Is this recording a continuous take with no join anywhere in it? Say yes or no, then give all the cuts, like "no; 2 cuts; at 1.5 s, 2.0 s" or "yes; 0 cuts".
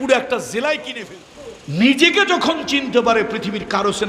no; 1 cut; at 0.9 s